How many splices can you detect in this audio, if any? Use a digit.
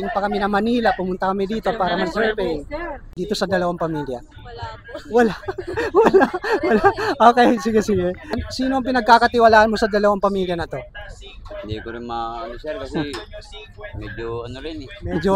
2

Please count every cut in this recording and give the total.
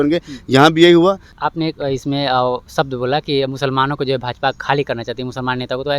1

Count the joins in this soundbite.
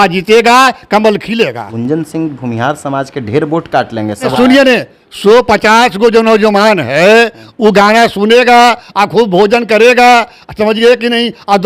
2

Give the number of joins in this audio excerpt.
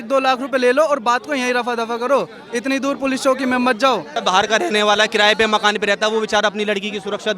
1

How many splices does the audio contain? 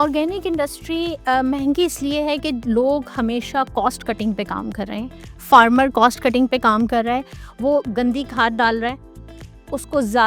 0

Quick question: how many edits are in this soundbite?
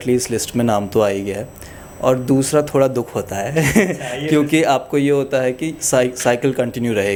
0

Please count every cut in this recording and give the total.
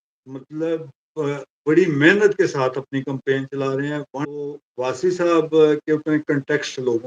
1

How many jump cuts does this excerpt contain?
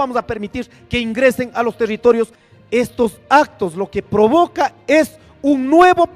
1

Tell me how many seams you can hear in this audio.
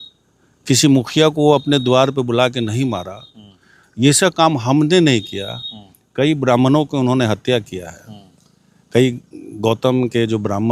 0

